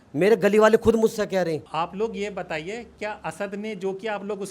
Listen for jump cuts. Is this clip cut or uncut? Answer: cut